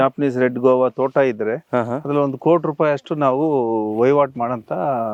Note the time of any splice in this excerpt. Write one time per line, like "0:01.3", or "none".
none